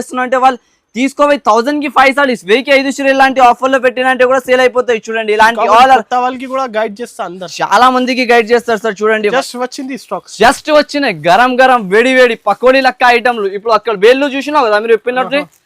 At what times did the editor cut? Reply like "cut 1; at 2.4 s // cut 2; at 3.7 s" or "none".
cut 1; at 9.3 s

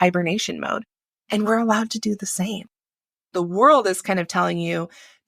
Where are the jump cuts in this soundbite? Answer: cut 1; at 3.3 s

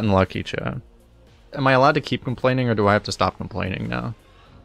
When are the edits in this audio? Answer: cut 1; at 1.5 s

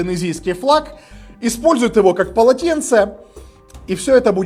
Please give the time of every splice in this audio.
none

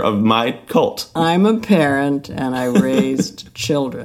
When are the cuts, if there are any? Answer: cut 1; at 1.1 s

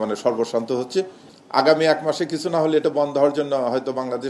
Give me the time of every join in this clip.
cut 1; at 1.2 s

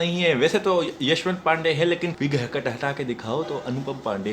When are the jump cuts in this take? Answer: cut 1; at 2.1 s

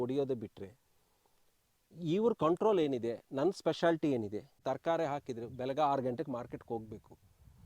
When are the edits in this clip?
cut 1; at 4.5 s

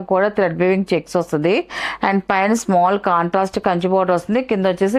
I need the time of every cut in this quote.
none

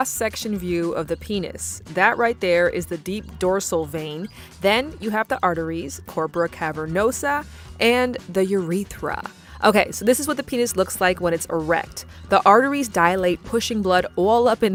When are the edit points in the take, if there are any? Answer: none

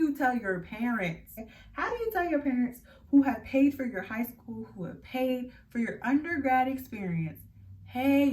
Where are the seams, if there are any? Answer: cut 1; at 1.4 s

